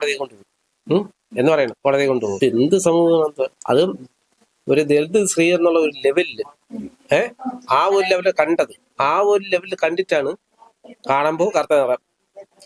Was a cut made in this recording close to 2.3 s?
yes; 1 cut; at 2.3 s

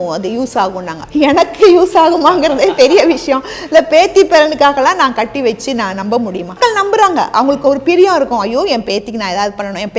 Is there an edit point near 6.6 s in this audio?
yes; 2 cuts; at 0.9 s, 6.6 s

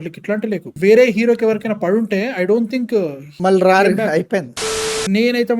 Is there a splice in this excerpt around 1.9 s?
no; 2 cuts; at 3.2 s, 4.6 s

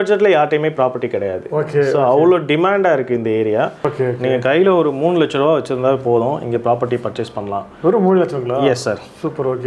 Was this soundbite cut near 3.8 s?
yes; 1 cut; at 3.8 s

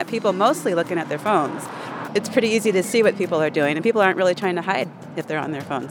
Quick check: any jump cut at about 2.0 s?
yes; 1 cut; at 2.0 s

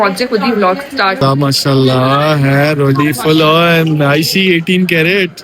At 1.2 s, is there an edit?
yes; 1 cut; at 1.2 s

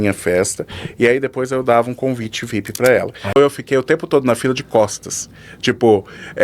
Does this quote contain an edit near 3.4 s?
yes; 1 cut; at 3.4 s

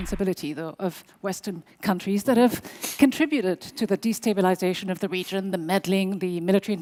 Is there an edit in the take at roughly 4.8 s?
no; 0 cuts

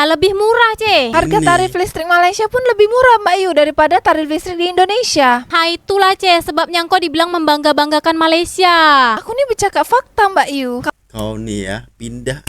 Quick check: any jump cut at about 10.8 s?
yes; 2 cuts; at 1.1 s, 10.8 s

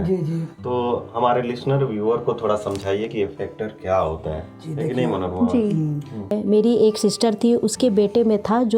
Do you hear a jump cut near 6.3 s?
yes; 1 cut; at 6.3 s

